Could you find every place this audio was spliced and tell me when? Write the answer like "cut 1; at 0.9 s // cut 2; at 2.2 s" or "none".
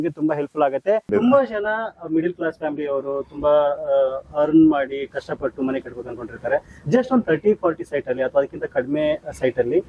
cut 1; at 1.1 s